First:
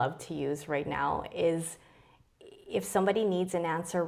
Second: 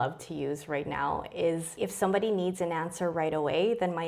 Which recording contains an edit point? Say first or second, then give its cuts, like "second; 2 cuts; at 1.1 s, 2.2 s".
second; 1 cut; at 1.7 s